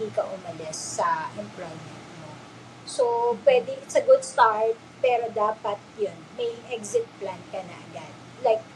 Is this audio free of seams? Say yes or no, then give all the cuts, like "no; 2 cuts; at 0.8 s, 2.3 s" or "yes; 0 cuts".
yes; 0 cuts